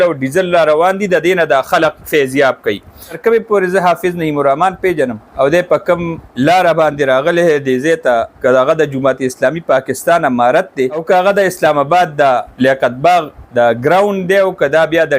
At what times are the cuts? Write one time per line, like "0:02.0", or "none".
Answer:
0:03.2
0:05.2
0:06.3
0:08.4
0:11.0
0:12.5
0:13.4